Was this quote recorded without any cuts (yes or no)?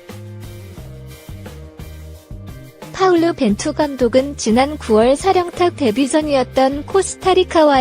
no